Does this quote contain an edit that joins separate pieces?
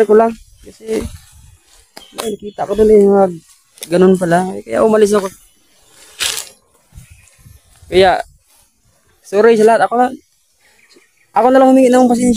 yes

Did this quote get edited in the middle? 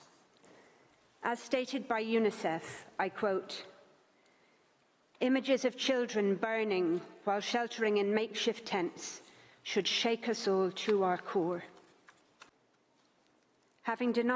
yes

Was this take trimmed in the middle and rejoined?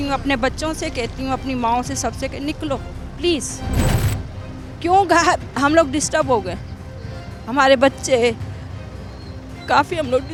no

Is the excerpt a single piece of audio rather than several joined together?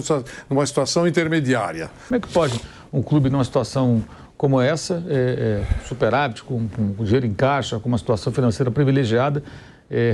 no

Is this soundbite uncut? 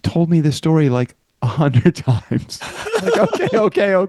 yes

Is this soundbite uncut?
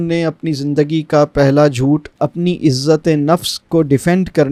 yes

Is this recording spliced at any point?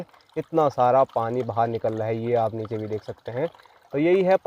no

